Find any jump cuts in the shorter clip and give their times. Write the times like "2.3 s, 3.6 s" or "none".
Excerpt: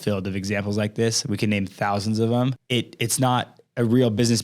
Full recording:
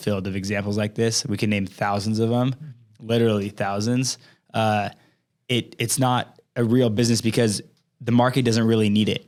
2.6 s